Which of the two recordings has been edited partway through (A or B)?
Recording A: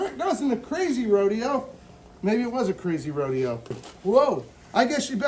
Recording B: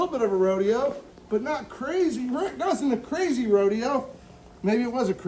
A